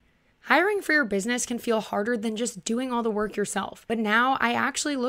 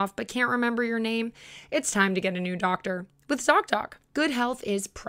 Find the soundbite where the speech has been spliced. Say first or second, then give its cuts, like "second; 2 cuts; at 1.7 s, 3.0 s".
second; 1 cut; at 4.0 s